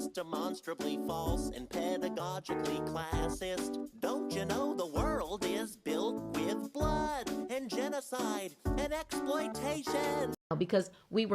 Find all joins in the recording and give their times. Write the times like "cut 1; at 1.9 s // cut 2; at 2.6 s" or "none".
cut 1; at 10.4 s